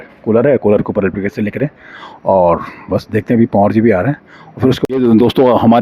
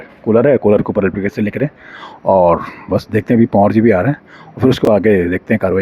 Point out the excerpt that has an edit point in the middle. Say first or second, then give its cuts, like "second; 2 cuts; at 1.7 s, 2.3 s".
first; 1 cut; at 4.9 s